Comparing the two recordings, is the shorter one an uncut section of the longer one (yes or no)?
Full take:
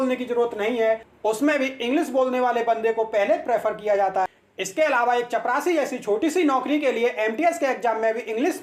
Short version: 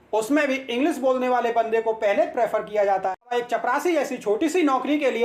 no